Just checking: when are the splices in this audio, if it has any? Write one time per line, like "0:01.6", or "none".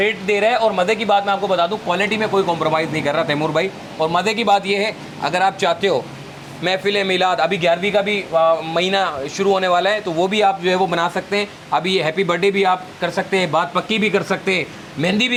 none